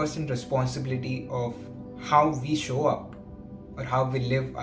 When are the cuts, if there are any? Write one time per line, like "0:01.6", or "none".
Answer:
none

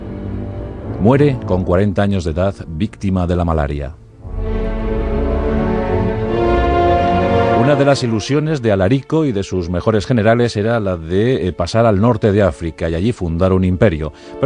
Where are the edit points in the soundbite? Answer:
0:11.9

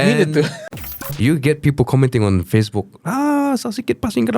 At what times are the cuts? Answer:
0:00.9

